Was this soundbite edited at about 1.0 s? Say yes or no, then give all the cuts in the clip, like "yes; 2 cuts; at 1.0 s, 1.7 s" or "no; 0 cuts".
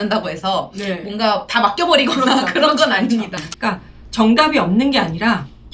no; 1 cut; at 3.4 s